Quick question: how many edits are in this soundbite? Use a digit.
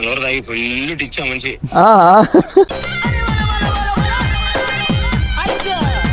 0